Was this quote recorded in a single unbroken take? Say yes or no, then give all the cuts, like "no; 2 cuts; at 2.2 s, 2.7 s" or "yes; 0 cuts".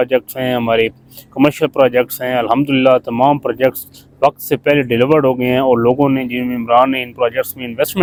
yes; 0 cuts